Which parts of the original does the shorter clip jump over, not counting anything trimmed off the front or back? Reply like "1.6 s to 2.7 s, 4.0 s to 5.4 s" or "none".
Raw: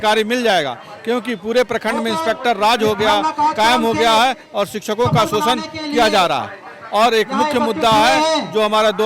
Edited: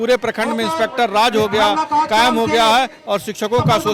none

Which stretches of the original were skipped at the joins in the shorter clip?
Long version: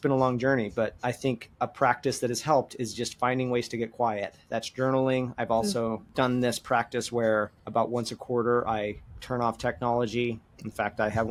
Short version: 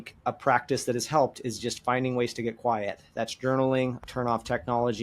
5.3 s to 9.1 s

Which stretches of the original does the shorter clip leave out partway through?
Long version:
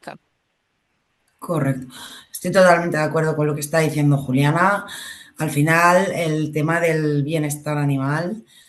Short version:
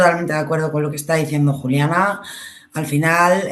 none

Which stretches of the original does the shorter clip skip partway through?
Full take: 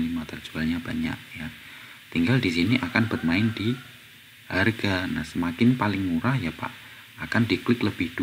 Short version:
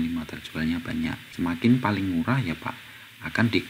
1.3 s to 5.3 s

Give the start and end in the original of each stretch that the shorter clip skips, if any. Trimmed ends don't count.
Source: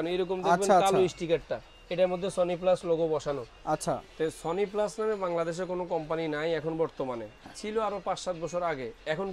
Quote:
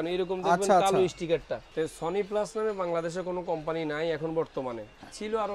1.6 s to 4.1 s

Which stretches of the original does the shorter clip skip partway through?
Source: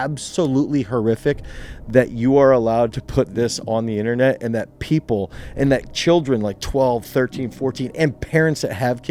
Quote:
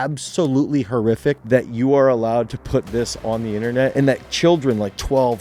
1.4 s to 1.8 s, 4.4 s to 5.6 s

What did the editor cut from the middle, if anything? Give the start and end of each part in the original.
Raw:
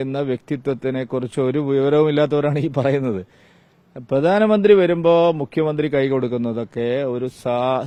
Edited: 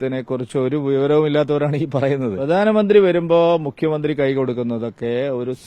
3.2 s to 4.1 s

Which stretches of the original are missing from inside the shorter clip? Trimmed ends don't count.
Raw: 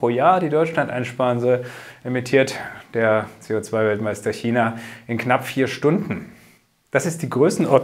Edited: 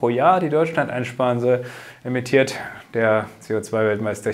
none

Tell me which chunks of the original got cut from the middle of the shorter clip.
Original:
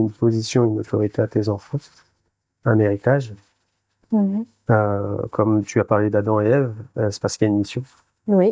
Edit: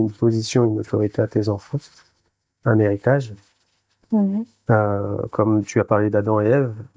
none

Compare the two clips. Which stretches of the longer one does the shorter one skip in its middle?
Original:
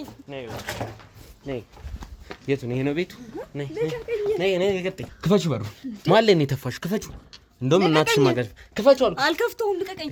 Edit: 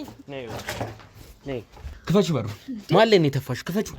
1.9 s to 5.1 s

